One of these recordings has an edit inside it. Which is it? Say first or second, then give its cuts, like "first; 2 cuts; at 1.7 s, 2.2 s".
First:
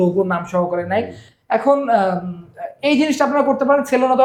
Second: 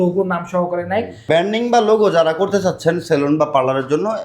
second; 1 cut; at 1.3 s